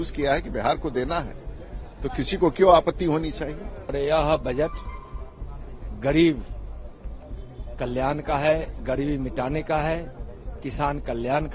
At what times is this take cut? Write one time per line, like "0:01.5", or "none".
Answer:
0:03.9

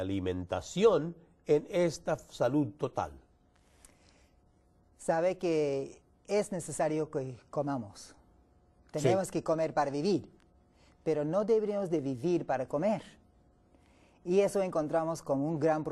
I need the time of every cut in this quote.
0:12.2

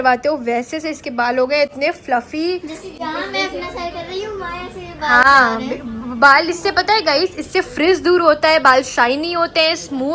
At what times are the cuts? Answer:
none

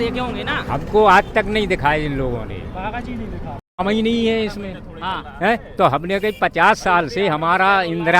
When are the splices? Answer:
0:03.7

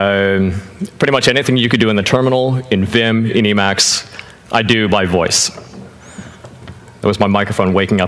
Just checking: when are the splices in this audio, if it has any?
0:02.8

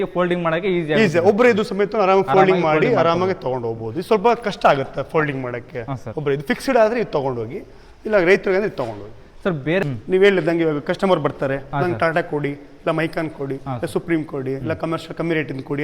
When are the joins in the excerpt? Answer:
0:09.8

